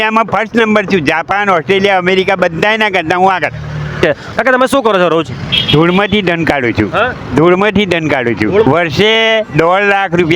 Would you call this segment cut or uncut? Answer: cut